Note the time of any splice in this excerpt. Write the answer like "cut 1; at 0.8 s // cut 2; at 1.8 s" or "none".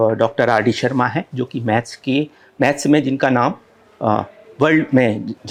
none